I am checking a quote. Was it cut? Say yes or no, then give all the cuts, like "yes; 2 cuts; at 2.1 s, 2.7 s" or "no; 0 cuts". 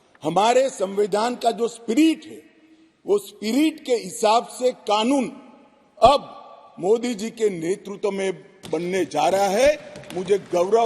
no; 0 cuts